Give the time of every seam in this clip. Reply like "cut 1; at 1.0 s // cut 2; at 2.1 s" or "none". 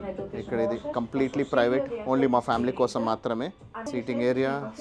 cut 1; at 3.9 s